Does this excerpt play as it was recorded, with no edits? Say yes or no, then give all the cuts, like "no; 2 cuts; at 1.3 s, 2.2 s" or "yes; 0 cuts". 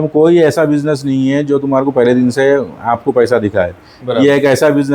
yes; 0 cuts